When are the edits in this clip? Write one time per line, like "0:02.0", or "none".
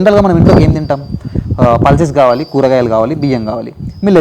none